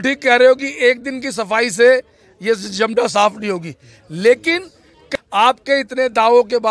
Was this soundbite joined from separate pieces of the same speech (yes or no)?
yes